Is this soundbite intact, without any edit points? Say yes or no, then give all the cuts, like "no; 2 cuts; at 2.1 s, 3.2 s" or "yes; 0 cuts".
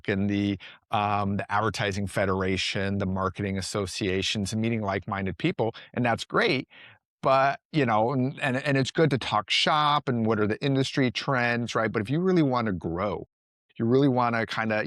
yes; 0 cuts